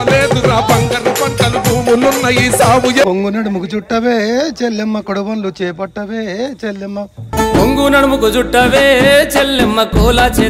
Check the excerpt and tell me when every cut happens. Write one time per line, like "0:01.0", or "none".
0:03.1